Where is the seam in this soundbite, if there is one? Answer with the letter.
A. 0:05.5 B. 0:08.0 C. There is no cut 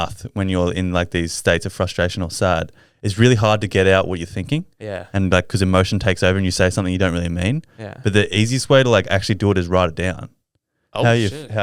C